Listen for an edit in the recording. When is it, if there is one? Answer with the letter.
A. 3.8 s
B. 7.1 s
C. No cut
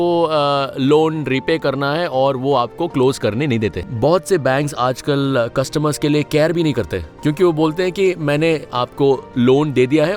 A